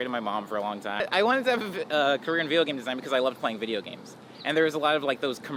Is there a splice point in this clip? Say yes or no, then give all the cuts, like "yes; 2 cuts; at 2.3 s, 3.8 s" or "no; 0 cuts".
yes; 1 cut; at 1.0 s